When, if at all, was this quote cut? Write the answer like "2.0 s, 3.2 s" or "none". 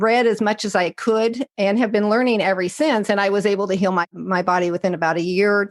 1.4 s, 4.1 s